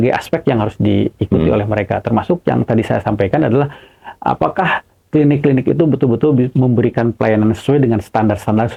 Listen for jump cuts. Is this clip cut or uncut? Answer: uncut